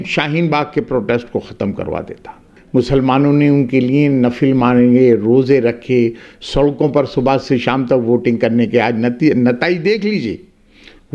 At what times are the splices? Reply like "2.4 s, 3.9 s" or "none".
2.6 s